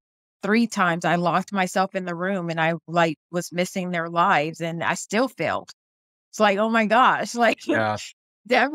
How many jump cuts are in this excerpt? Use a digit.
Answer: 0